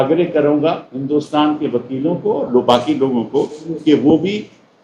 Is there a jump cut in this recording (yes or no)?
no